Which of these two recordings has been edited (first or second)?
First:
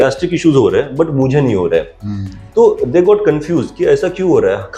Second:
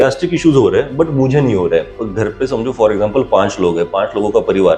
second